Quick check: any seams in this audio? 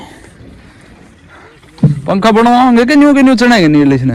no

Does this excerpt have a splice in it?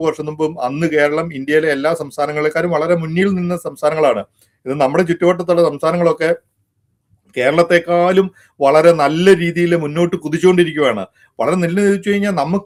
no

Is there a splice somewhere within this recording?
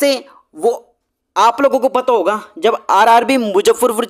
no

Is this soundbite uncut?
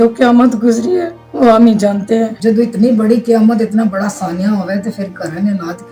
no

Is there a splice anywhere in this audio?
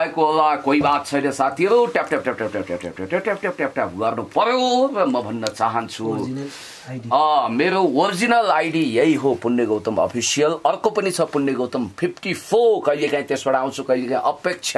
no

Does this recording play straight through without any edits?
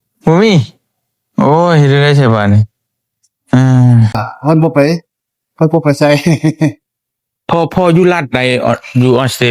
no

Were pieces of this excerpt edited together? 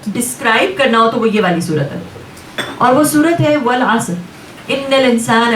no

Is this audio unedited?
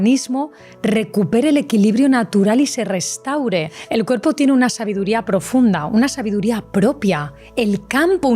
no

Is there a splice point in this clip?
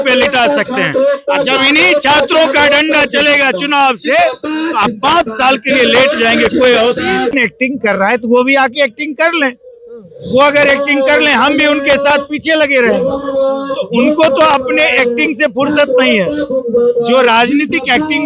yes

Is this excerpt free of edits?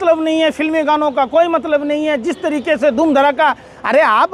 yes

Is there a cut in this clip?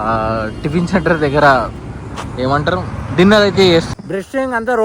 yes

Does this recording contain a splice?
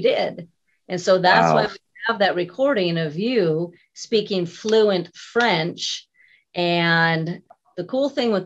yes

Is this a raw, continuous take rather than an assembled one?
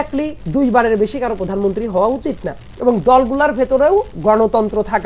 yes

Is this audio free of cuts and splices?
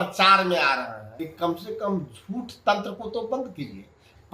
no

